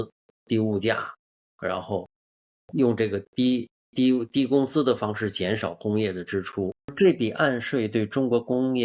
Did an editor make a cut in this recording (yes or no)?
yes